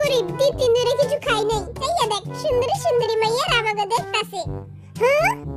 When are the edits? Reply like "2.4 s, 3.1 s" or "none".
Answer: 1.8 s